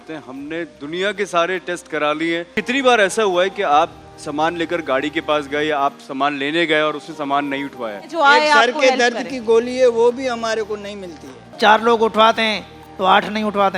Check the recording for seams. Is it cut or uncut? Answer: cut